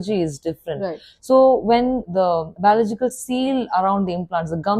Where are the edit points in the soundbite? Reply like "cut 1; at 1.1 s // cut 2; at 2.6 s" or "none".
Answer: cut 1; at 2.0 s